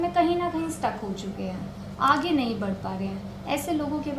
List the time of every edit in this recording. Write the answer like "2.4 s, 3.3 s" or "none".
none